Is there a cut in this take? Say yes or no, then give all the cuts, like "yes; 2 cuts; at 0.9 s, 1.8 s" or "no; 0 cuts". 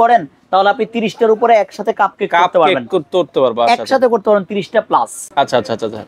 no; 0 cuts